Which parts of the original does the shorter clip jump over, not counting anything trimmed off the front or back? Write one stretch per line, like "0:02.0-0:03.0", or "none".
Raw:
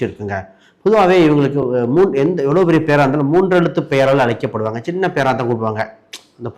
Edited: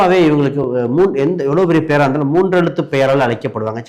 none